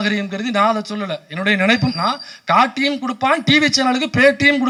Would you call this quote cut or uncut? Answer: uncut